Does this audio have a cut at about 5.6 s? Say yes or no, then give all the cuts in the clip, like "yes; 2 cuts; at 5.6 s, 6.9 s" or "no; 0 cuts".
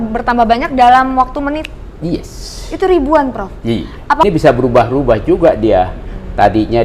no; 1 cut; at 4.2 s